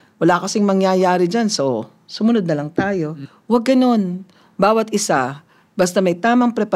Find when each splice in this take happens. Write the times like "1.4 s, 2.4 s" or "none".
3.1 s